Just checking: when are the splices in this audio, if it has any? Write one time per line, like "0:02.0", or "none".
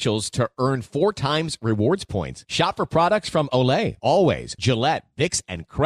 none